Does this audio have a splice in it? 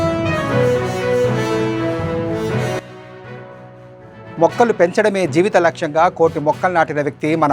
yes; 1 cut; at 4.2 s

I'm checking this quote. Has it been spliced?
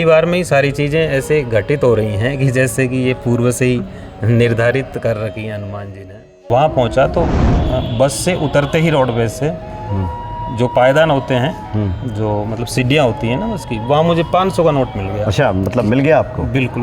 yes; 1 cut; at 6.4 s

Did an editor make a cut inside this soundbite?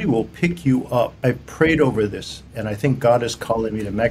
yes; 1 cut; at 1.1 s

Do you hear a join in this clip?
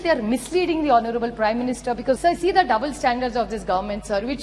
yes; 1 cut; at 2.2 s

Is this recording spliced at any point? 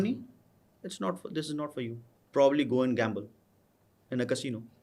yes; 1 cut; at 2.1 s

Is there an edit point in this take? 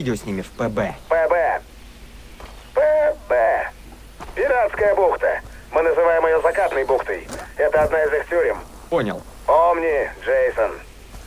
yes; 1 cut; at 1.0 s

